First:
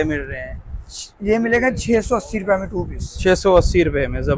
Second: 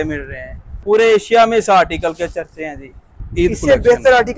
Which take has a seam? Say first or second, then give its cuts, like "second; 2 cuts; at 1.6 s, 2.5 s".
second; 2 cuts; at 0.8 s, 3.1 s